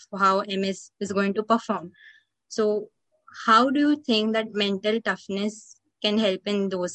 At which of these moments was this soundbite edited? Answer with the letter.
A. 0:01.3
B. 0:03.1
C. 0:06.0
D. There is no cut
D